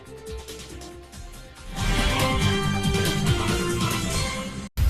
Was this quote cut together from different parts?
no; 0 cuts

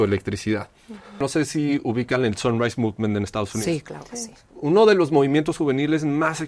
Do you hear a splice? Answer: yes; 1 cut; at 1.2 s

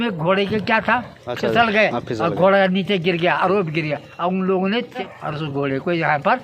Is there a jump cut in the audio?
yes; 2 cuts; at 1.2 s, 5.1 s

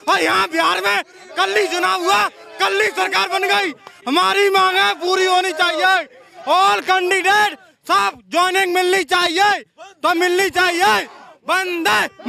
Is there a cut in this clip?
no; 0 cuts

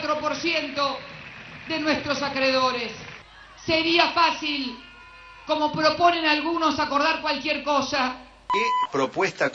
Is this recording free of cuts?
no; 2 cuts; at 3.1 s, 8.5 s

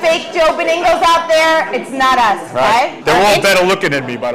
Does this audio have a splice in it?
yes; 1 cut; at 3.0 s

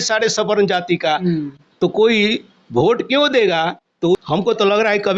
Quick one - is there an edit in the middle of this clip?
yes; 1 cut; at 4.2 s

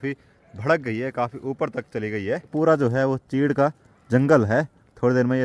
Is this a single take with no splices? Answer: no; 1 cut; at 2.5 s

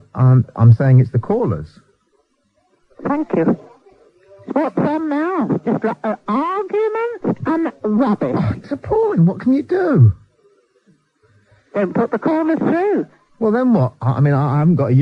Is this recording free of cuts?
no; 1 cut; at 13.1 s

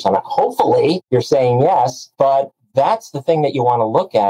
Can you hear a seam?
yes; 2 cuts; at 1.0 s, 2.0 s

